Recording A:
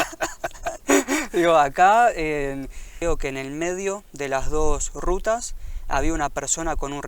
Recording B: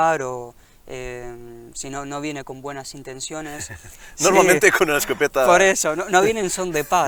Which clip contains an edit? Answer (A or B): A